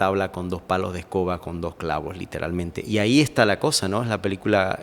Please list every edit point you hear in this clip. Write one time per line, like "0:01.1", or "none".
0:02.8